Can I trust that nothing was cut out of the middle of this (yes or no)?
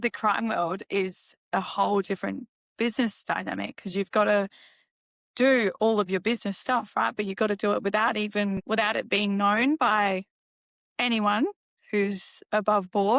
no